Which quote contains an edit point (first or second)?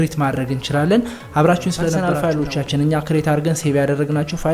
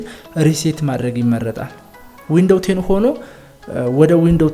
first